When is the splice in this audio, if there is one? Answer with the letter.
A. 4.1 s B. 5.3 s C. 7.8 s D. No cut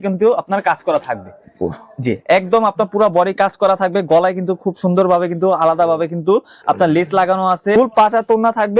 C